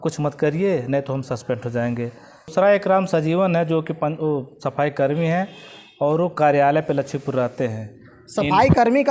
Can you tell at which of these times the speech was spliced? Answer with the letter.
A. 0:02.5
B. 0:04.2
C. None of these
A